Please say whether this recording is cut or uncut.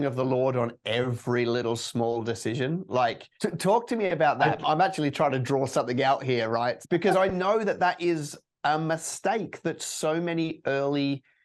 cut